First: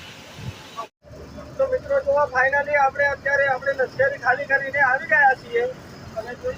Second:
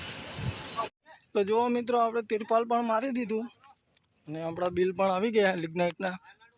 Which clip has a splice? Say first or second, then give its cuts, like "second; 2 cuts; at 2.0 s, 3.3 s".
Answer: second; 1 cut; at 1.0 s